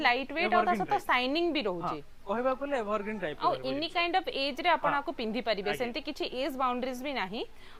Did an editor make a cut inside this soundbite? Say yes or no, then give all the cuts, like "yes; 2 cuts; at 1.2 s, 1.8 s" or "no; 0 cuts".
no; 0 cuts